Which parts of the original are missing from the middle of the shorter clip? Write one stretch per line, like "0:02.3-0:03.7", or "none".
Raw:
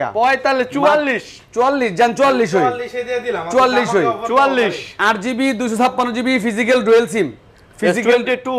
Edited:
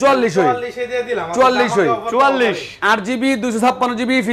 none